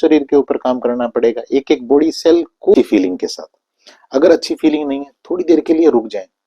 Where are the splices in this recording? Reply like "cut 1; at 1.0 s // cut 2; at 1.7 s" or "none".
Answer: cut 1; at 2.7 s

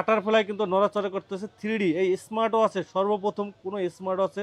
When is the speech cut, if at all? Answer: none

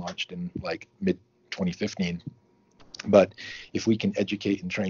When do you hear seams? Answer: cut 1; at 0.9 s

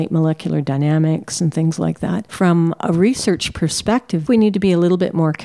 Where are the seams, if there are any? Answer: cut 1; at 4.2 s

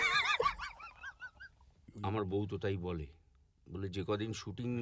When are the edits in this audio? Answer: cut 1; at 1.9 s

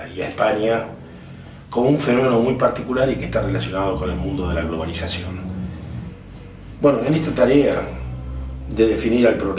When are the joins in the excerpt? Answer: cut 1; at 4.7 s

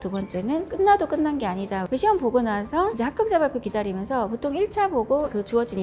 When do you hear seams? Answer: cut 1; at 1.8 s

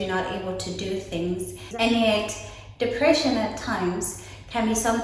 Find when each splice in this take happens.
cut 1; at 1.6 s

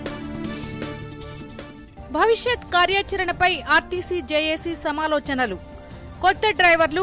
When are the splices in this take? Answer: cut 1; at 1.5 s

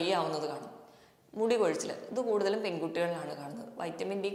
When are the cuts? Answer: none

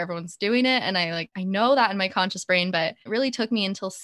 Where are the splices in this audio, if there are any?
cut 1; at 1.3 s // cut 2; at 3.0 s

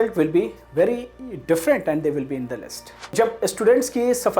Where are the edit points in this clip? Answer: cut 1; at 3.1 s

